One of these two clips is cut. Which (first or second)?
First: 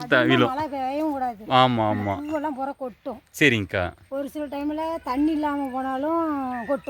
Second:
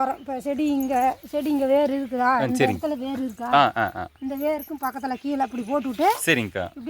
second